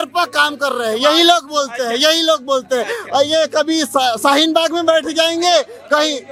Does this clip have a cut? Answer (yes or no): no